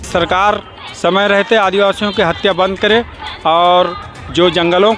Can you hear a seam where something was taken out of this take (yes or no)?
no